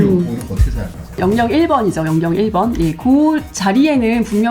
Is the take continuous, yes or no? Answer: no